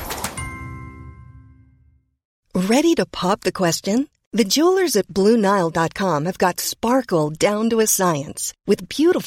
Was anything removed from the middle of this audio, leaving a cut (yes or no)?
no